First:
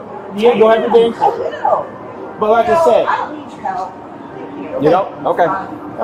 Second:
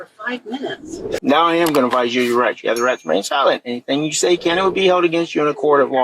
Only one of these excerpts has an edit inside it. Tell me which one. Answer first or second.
second